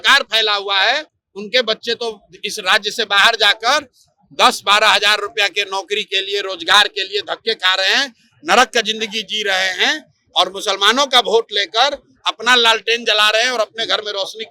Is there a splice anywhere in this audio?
no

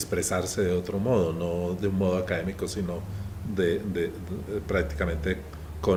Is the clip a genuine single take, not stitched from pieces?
yes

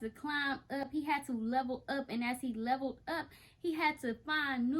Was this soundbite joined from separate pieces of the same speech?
no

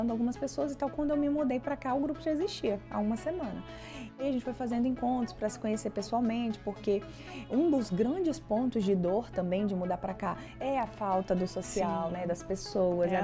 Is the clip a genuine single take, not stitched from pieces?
no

